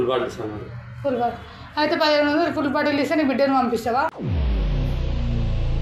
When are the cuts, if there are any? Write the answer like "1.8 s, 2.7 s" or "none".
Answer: none